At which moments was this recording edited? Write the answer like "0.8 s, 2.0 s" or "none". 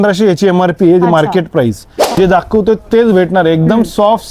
2.1 s